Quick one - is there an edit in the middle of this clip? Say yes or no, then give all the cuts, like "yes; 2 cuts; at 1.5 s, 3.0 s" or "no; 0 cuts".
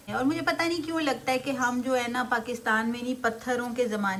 no; 0 cuts